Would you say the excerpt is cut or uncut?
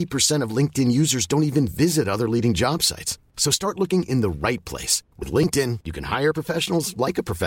uncut